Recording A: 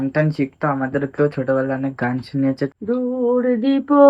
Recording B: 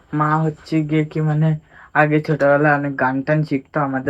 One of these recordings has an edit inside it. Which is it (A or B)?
A